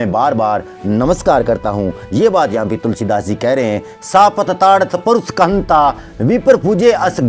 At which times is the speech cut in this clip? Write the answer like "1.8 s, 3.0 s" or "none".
3.9 s